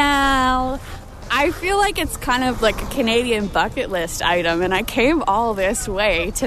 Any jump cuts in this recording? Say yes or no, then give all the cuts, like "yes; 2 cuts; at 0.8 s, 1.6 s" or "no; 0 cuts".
yes; 1 cut; at 1.0 s